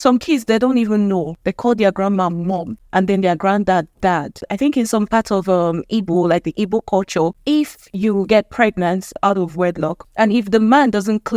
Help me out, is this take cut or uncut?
cut